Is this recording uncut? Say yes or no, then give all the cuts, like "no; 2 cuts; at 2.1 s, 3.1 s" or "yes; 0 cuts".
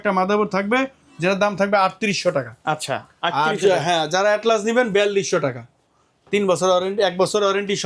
yes; 0 cuts